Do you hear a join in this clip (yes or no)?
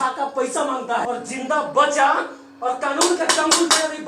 yes